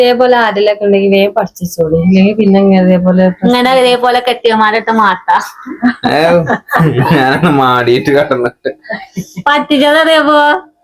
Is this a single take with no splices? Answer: yes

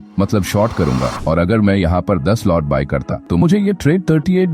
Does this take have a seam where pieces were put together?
yes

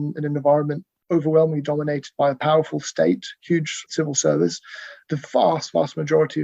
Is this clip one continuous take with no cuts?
no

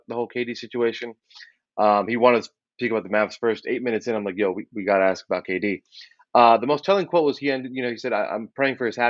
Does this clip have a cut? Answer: no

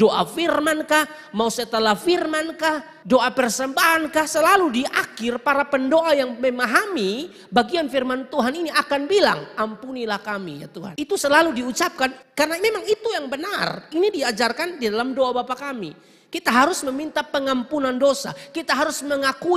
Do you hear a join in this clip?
yes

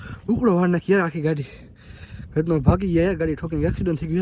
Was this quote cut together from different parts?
no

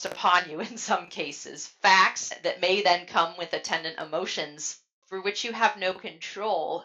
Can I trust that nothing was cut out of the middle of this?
no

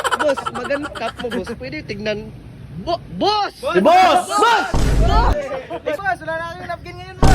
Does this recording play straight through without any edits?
no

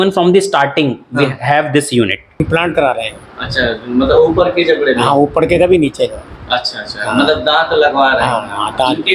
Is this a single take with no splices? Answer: no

